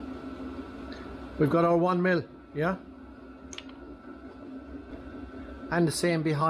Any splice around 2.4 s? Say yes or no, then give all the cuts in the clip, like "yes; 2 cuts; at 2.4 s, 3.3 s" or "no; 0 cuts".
no; 1 cut; at 4.9 s